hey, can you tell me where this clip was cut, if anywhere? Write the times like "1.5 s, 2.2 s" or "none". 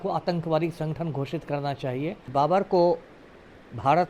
2.3 s